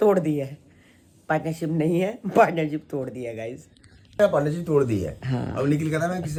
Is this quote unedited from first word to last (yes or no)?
yes